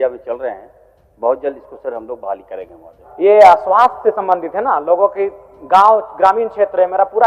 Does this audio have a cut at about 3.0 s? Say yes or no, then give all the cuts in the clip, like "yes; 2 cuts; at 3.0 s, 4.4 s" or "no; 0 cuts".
yes; 1 cut; at 3.0 s